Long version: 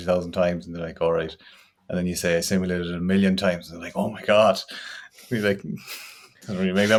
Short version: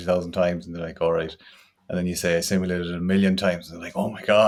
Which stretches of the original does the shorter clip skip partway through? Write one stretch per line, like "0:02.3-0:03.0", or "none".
none